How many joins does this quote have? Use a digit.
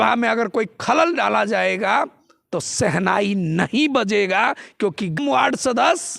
1